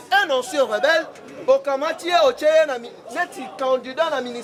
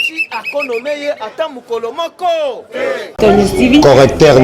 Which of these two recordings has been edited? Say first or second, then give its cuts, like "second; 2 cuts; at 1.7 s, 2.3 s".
second; 1 cut; at 3.1 s